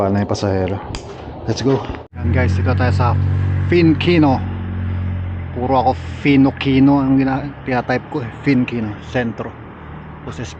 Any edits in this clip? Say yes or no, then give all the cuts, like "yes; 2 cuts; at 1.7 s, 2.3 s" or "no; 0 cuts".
yes; 1 cut; at 2.2 s